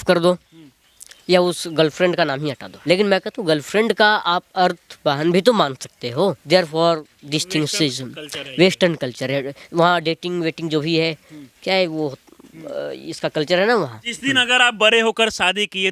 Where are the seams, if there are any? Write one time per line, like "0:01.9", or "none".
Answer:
0:02.7
0:06.4
0:14.0